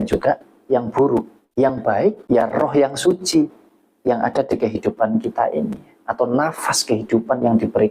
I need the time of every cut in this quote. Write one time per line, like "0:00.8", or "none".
0:01.4
0:02.2

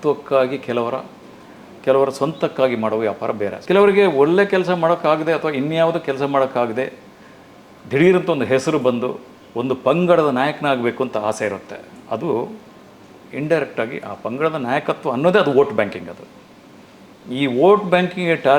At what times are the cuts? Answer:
0:03.6

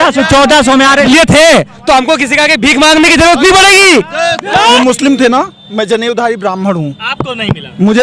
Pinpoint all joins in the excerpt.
0:01.1
0:04.7

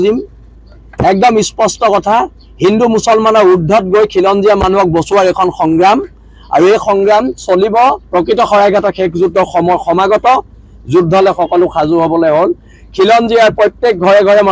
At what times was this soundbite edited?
0:08.0

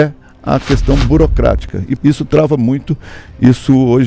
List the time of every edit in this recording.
0:01.9

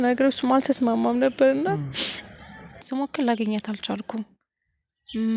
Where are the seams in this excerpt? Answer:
0:02.9

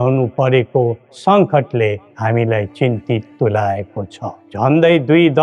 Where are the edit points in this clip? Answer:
0:04.4

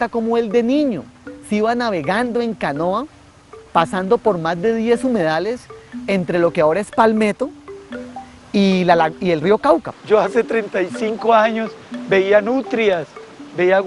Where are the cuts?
0:09.9

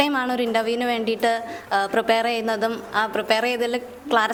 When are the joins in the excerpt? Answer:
none

